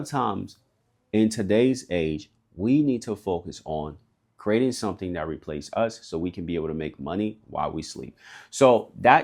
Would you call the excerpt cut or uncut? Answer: uncut